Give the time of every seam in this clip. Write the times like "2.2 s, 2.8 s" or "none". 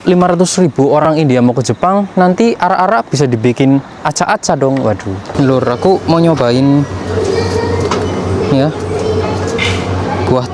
1.0 s, 5.3 s